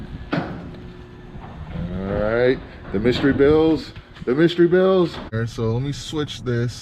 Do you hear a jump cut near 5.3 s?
yes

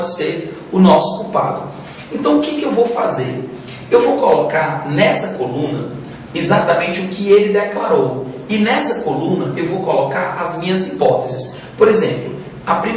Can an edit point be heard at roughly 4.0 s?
no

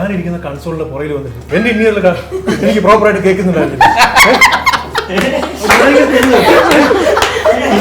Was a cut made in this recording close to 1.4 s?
yes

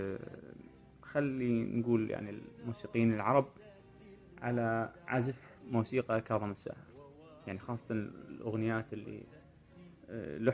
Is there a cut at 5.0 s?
yes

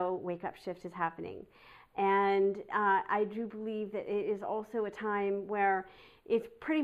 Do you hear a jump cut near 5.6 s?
no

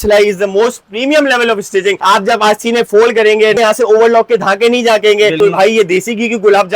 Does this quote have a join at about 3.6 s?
yes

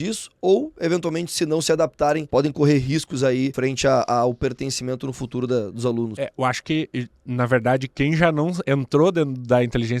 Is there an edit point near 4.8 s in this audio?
no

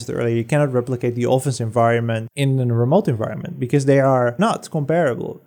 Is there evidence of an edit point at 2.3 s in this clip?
yes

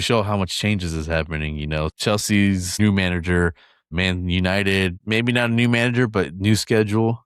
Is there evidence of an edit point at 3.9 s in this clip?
yes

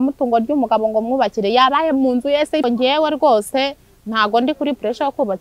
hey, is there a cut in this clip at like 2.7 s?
yes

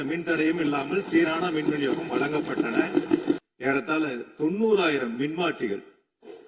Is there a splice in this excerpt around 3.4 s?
yes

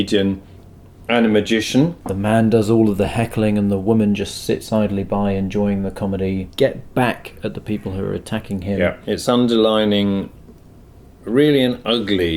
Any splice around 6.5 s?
yes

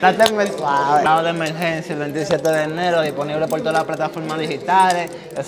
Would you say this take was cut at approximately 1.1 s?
yes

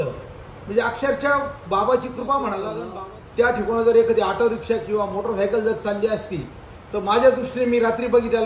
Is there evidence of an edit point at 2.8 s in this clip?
yes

